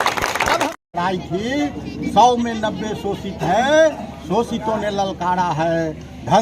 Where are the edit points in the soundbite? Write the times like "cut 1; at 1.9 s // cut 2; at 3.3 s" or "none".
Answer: cut 1; at 0.9 s

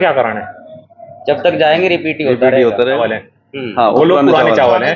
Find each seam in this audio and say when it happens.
cut 1; at 3.0 s

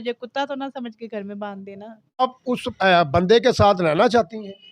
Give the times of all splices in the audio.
cut 1; at 2.2 s

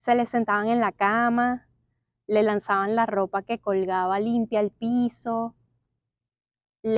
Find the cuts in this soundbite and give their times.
none

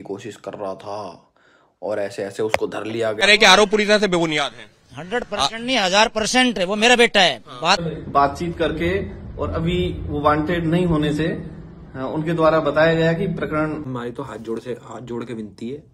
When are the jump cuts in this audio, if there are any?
cut 1; at 3.2 s // cut 2; at 7.8 s // cut 3; at 13.9 s

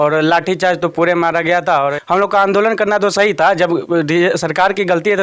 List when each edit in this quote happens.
cut 1; at 2.0 s

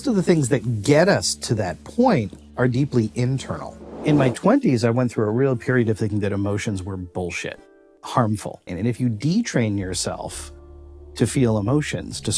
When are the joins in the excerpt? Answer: cut 1; at 4.0 s // cut 2; at 7.9 s // cut 3; at 8.6 s

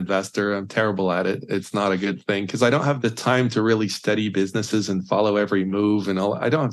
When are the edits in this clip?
cut 1; at 3.0 s

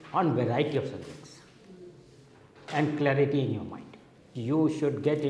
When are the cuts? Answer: cut 1; at 4.3 s

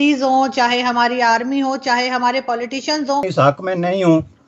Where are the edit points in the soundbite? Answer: cut 1; at 3.3 s

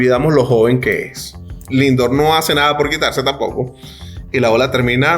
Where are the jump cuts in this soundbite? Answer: cut 1; at 1.5 s

